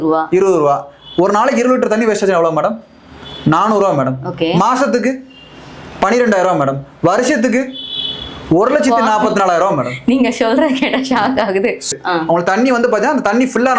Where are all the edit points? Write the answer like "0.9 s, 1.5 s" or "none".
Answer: 11.9 s